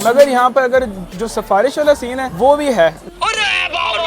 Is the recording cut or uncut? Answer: cut